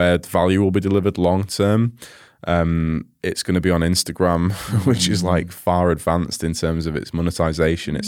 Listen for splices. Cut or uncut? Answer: uncut